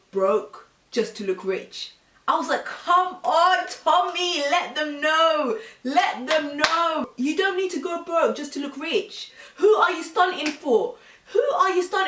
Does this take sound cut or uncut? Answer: uncut